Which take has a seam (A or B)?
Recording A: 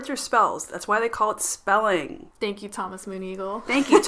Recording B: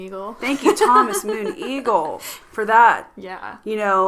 A